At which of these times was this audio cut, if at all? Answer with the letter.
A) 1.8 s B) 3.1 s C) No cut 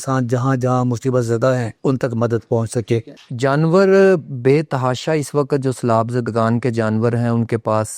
B